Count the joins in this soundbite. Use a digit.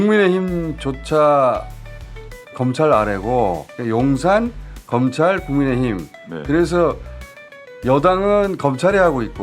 0